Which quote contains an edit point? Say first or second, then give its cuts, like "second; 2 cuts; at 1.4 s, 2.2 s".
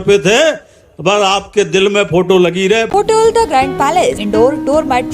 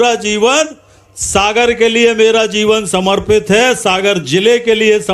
first; 2 cuts; at 2.9 s, 4.2 s